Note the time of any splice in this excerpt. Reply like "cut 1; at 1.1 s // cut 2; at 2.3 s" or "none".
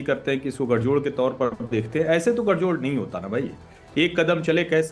none